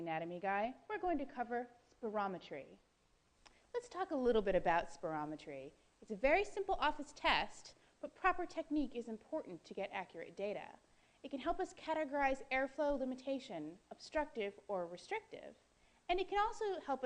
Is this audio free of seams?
no; 1 cut; at 10.8 s

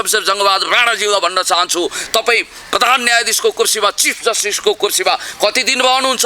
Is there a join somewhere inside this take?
no; 0 cuts

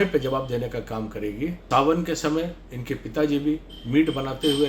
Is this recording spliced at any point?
yes; 1 cut; at 1.6 s

